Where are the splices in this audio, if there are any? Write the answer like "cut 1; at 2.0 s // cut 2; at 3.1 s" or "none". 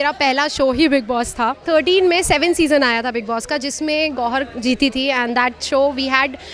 cut 1; at 1.6 s